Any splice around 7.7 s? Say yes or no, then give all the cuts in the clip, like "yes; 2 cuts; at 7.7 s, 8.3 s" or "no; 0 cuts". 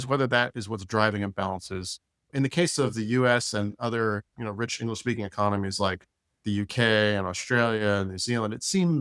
no; 1 cut; at 2.3 s